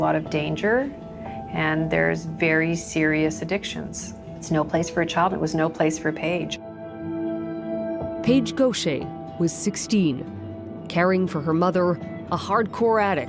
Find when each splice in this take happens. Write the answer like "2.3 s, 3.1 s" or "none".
none